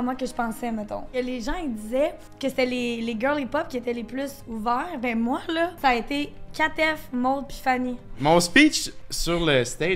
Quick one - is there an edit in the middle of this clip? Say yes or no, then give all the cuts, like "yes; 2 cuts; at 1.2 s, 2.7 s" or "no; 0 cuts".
yes; 4 cuts; at 1.1 s, 2.3 s, 5.8 s, 8.1 s